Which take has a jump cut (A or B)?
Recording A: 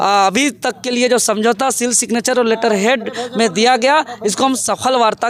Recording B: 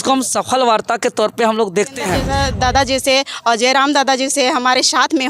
B